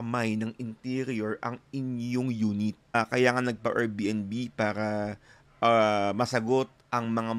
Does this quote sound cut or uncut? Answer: cut